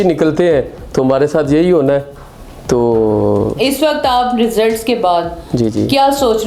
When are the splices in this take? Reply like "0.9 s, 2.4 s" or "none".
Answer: none